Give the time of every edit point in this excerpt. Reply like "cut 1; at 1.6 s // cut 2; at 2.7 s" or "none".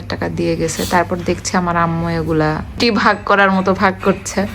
cut 1; at 2.8 s